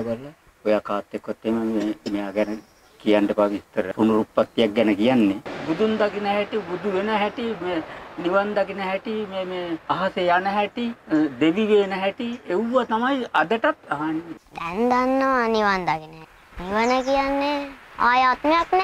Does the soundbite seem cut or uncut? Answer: cut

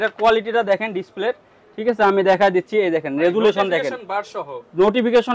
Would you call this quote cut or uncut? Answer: uncut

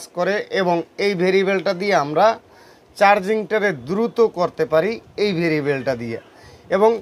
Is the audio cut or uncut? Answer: uncut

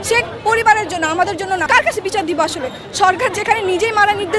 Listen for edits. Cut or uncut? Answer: cut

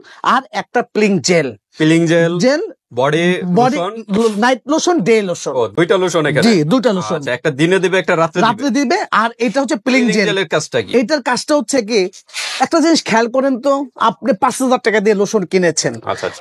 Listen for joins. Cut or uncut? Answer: uncut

